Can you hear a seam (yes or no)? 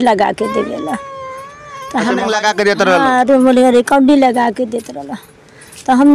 yes